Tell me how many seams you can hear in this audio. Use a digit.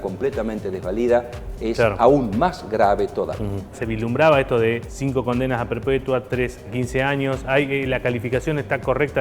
3